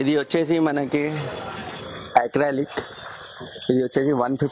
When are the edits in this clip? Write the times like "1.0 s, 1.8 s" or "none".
none